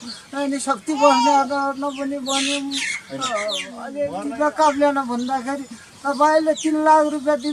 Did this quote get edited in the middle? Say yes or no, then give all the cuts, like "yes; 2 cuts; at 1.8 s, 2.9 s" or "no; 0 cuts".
yes; 1 cut; at 3.9 s